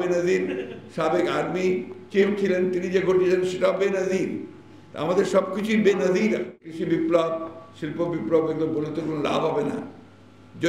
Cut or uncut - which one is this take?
cut